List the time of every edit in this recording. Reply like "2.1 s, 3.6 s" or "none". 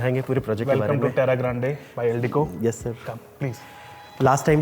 none